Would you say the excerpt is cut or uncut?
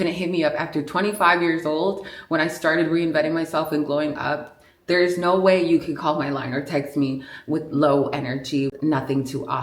cut